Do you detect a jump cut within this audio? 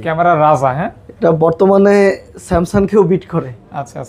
no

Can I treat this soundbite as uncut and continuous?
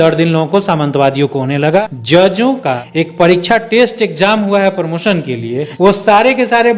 no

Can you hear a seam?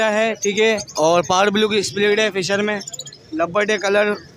no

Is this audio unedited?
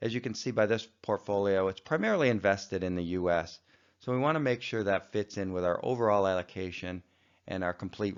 yes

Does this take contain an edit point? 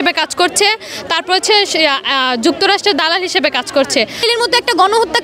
yes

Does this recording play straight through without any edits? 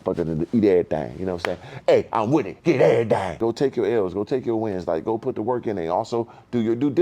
no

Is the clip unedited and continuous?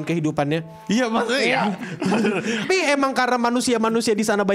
no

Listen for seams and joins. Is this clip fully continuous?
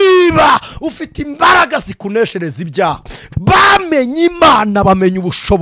no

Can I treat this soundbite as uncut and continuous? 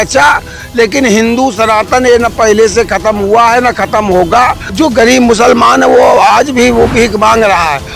no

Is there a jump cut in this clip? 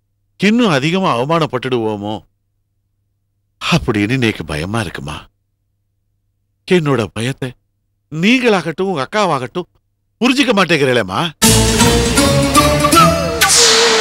no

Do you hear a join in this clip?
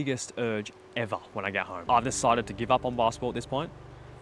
yes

